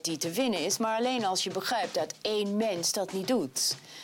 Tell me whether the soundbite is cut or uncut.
uncut